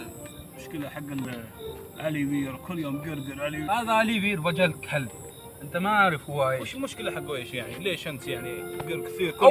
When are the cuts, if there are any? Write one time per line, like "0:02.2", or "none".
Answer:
0:01.2
0:03.6